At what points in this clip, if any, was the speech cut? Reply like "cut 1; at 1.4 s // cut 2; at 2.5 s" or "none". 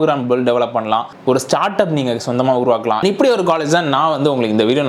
none